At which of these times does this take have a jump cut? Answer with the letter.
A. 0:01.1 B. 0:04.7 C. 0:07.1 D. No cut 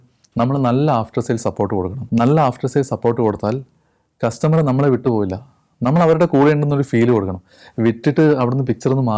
D